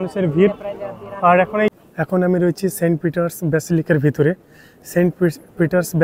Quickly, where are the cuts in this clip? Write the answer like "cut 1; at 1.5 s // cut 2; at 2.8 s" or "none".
cut 1; at 1.8 s